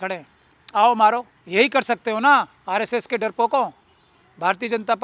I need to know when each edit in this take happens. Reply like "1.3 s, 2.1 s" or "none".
1.4 s